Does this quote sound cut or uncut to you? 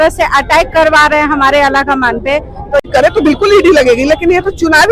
cut